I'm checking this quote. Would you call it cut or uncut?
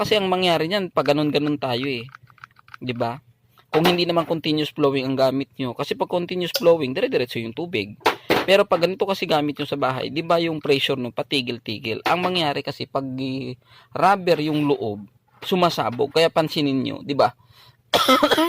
uncut